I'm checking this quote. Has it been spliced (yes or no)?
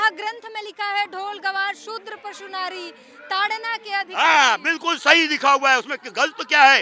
no